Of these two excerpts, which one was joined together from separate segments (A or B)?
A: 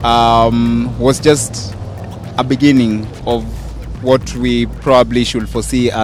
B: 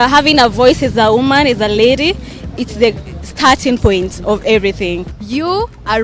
B